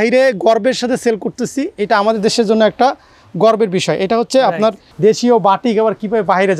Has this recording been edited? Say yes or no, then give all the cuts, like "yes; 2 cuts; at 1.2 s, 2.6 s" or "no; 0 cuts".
yes; 1 cut; at 4.9 s